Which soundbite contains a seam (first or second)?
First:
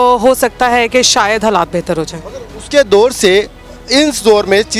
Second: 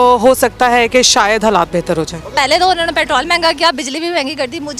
second